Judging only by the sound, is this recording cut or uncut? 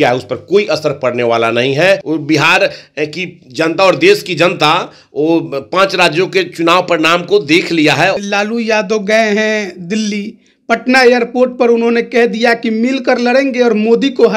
cut